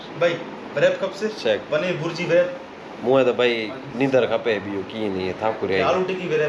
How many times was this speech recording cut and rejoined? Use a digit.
0